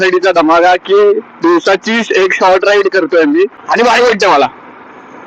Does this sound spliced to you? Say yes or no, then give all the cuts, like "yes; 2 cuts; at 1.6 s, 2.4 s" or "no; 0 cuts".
yes; 1 cut; at 3.6 s